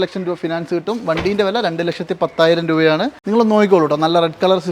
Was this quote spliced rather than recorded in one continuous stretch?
yes; 1 cut; at 3.1 s

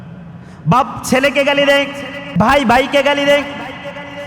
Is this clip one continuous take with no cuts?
no; 1 cut; at 2.3 s

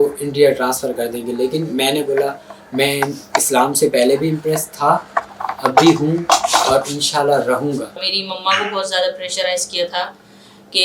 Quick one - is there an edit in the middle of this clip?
yes; 1 cut; at 7.9 s

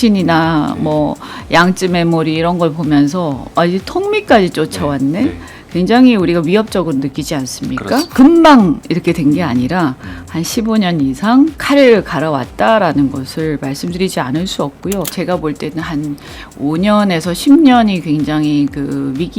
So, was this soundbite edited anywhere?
yes; 1 cut; at 15.1 s

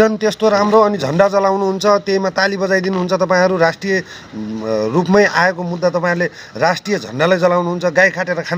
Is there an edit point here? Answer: no; 0 cuts

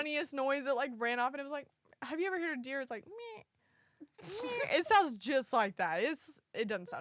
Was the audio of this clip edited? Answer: no; 0 cuts

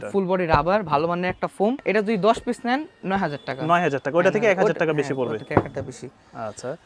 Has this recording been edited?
no; 0 cuts

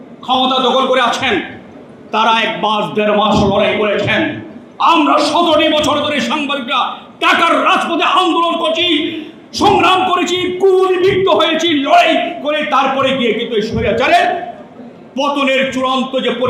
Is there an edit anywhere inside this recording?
no; 0 cuts

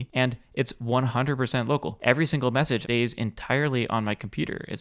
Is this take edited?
yes; 2 cuts; at 1.9 s, 2.8 s

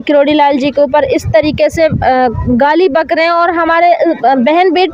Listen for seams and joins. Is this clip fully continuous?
yes; 0 cuts

